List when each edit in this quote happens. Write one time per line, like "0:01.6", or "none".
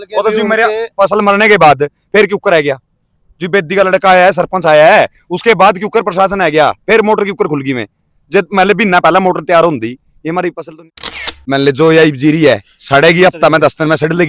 0:11.0